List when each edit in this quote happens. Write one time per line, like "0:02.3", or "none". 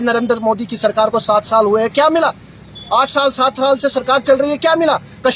none